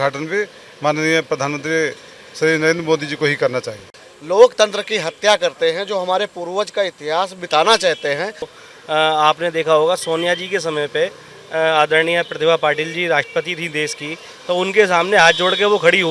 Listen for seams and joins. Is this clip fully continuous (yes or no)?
no